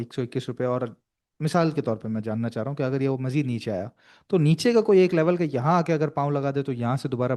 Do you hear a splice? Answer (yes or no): no